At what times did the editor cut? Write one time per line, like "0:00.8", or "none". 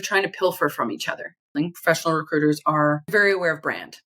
0:01.5
0:03.1